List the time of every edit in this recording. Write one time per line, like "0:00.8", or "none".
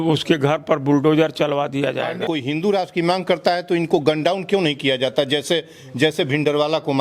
0:02.3